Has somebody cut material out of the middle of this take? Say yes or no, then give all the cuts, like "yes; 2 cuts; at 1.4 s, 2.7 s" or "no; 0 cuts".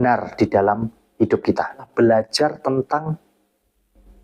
yes; 1 cut; at 1.9 s